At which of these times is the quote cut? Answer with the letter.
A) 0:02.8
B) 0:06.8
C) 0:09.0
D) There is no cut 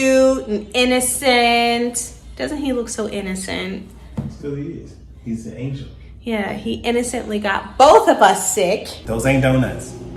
C